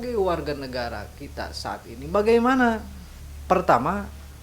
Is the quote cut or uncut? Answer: uncut